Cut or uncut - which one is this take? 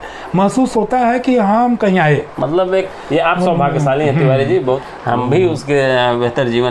cut